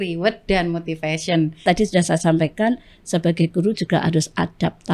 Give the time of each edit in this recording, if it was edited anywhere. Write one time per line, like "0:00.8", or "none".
0:01.6